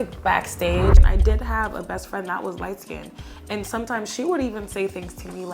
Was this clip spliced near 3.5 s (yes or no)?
no